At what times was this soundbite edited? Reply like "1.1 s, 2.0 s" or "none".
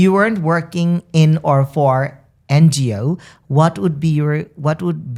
none